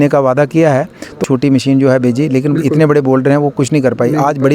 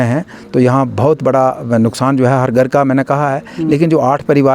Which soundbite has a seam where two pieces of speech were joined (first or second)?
first